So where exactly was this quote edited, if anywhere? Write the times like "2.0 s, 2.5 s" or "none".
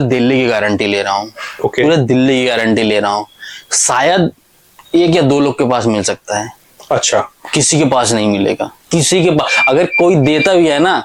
none